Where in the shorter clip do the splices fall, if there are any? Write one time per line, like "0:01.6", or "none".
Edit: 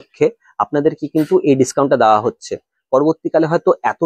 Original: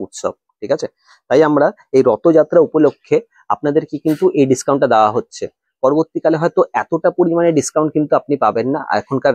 none